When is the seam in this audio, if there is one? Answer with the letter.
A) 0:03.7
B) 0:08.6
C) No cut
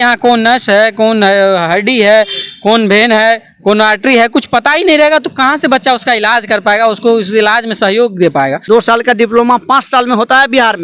B